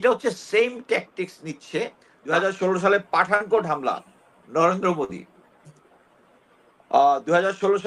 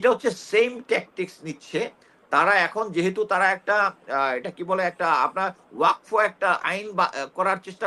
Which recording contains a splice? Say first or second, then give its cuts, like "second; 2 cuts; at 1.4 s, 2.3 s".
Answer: first; 1 cut; at 2.3 s